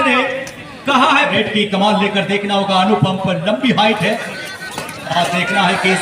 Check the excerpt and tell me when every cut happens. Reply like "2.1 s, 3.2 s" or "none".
1.3 s